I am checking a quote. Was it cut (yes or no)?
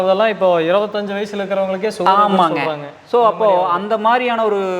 no